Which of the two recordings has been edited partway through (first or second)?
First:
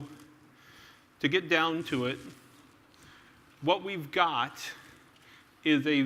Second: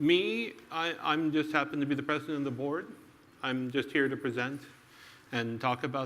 second